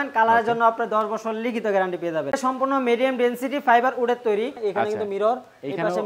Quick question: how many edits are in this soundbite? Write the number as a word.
two